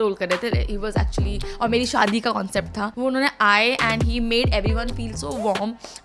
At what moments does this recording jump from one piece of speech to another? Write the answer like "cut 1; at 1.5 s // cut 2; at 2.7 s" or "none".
cut 1; at 2.9 s